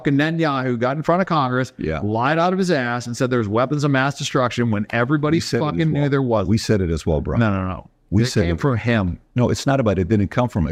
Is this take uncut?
yes; 0 cuts

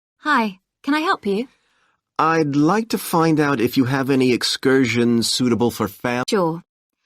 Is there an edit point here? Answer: yes; 2 cuts; at 2.5 s, 6.2 s

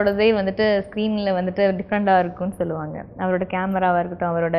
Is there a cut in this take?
no; 0 cuts

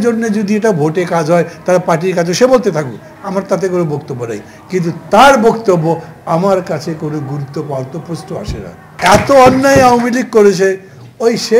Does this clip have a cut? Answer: yes; 1 cut; at 9.0 s

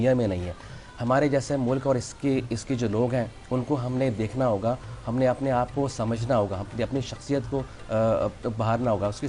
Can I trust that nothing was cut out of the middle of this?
yes; 0 cuts

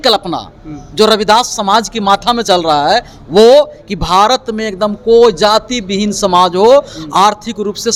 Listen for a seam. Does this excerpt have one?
no; 0 cuts

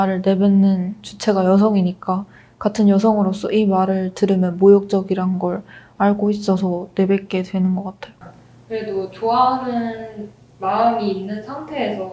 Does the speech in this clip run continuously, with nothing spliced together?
no; 1 cut; at 8.1 s

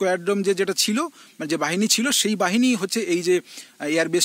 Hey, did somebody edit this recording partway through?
no; 0 cuts

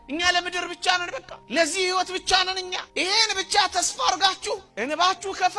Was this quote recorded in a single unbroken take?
no; 1 cut; at 4.7 s

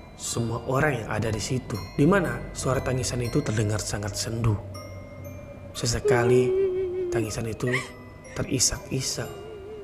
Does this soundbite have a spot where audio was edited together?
yes; 1 cut; at 1.8 s

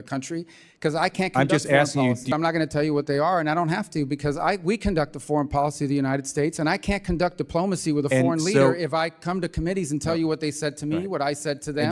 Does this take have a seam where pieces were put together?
yes; 1 cut; at 2.3 s

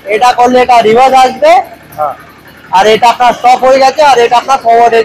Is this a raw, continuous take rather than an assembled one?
yes; 0 cuts

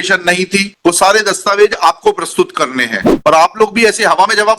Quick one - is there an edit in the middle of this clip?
yes; 1 cut; at 3.1 s

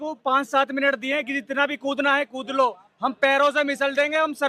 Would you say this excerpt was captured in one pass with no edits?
yes; 0 cuts

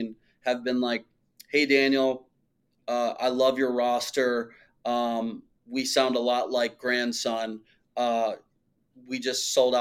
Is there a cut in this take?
no; 0 cuts

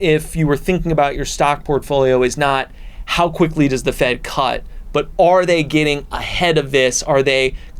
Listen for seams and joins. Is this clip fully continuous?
yes; 0 cuts

